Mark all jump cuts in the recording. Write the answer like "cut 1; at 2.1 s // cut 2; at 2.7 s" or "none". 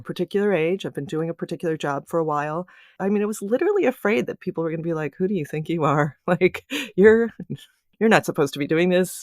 cut 1; at 2.9 s